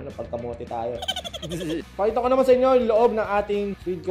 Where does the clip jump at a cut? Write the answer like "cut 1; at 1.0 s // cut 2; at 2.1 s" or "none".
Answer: cut 1; at 1.9 s